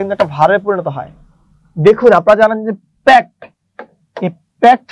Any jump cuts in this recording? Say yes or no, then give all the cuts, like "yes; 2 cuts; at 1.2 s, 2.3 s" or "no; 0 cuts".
no; 0 cuts